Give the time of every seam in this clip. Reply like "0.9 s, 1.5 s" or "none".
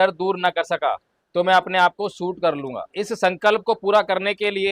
1.1 s, 3.0 s